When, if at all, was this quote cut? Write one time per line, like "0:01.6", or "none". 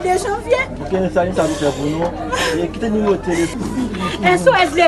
0:03.5